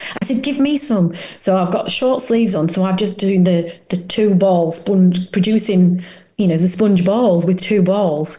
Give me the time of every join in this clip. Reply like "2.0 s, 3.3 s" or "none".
none